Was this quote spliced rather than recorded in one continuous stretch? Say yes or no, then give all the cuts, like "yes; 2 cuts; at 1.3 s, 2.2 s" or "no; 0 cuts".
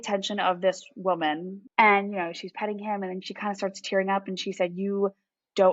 yes; 1 cut; at 1.6 s